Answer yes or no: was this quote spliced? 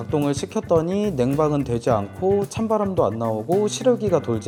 no